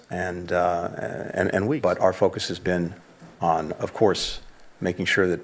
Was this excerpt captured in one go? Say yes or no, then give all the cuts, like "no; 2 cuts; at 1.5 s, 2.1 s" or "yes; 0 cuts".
no; 1 cut; at 1.7 s